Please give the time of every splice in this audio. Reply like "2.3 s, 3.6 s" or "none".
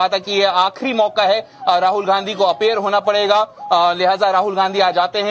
4.2 s